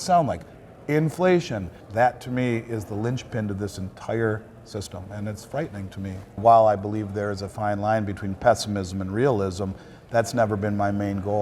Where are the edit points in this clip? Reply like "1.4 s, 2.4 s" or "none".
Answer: 1.8 s, 6.4 s